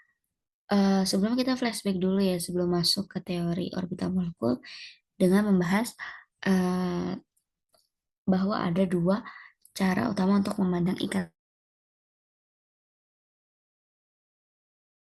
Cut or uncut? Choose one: uncut